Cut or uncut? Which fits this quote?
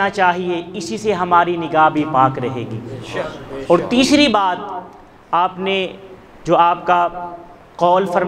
uncut